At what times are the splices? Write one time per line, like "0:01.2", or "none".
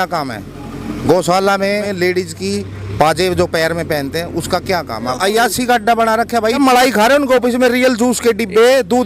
0:01.9
0:05.1
0:06.6